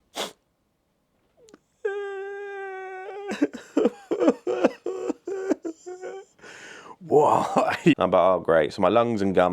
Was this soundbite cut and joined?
yes; 1 cut; at 8.0 s

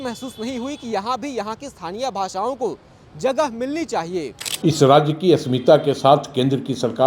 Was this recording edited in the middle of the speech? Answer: yes; 1 cut; at 4.4 s

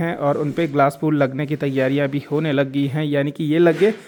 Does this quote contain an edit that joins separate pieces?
no; 0 cuts

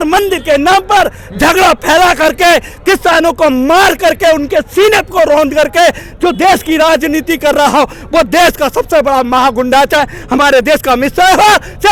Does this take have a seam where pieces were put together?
no; 0 cuts

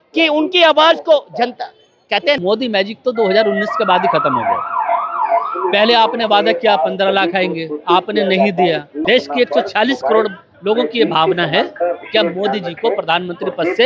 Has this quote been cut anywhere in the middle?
yes; 2 cuts; at 2.4 s, 9.0 s

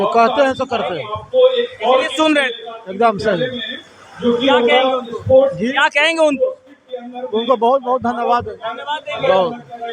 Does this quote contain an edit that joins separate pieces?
no; 0 cuts

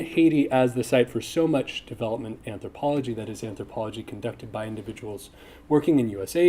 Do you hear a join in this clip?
yes; 1 cut; at 1.2 s

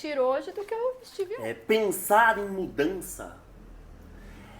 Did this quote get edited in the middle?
yes; 1 cut; at 1.1 s

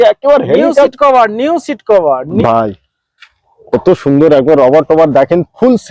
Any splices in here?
yes; 1 cut; at 2.4 s

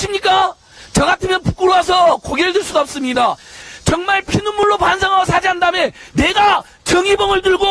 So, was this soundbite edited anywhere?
yes; 1 cut; at 3.6 s

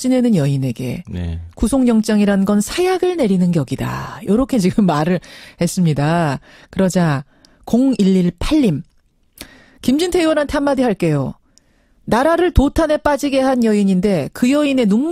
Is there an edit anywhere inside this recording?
yes; 1 cut; at 8.6 s

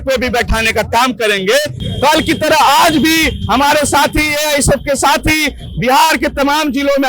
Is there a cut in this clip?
yes; 1 cut; at 1.8 s

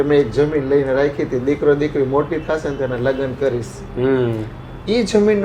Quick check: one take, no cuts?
yes; 0 cuts

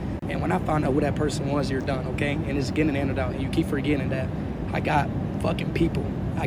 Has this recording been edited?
no; 0 cuts

